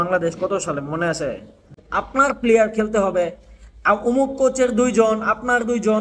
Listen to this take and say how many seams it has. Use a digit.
1